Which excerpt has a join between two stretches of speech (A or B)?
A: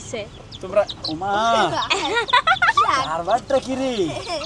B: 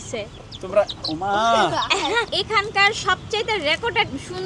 B